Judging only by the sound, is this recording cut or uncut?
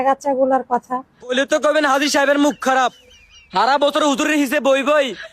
cut